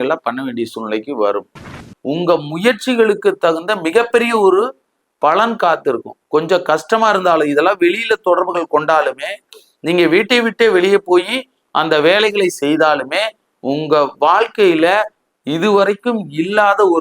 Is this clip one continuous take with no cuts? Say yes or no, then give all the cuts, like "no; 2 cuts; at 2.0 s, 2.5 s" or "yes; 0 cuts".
no; 1 cut; at 1.8 s